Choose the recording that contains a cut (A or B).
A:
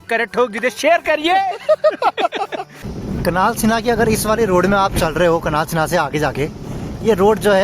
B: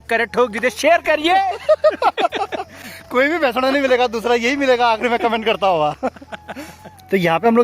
A